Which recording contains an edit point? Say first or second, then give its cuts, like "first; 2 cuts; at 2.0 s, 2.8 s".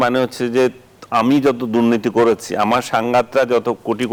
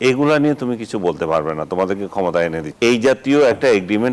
second; 1 cut; at 2.7 s